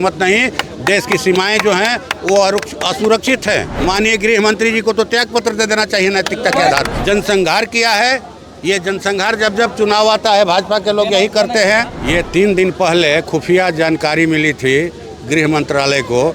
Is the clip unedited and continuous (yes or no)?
no